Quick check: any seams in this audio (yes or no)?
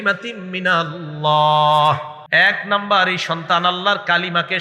yes